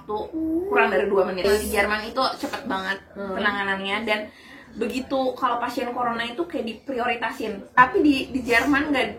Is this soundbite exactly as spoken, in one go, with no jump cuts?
no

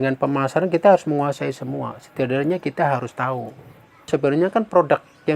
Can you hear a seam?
yes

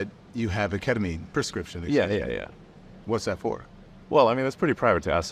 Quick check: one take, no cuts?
yes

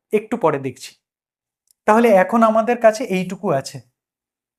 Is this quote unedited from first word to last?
yes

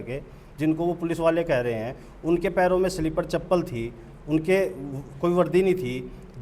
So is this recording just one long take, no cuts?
yes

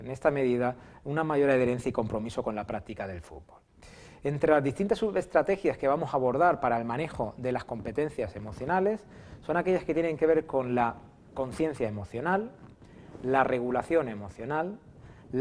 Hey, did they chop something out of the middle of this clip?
yes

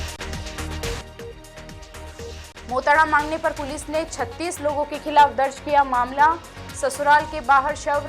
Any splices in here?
yes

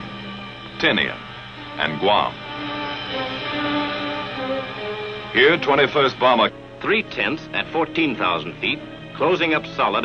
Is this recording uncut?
yes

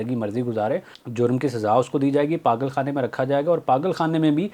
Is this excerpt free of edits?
no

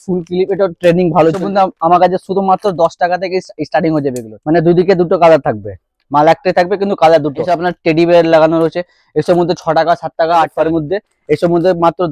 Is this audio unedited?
no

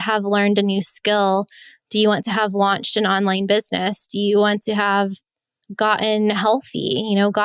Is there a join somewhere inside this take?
no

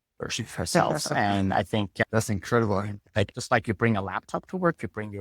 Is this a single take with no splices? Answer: no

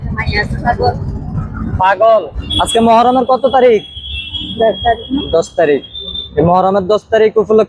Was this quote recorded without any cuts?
no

